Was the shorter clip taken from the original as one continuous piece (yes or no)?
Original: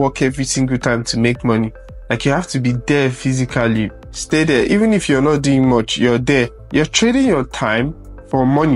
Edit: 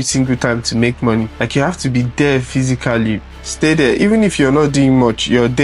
no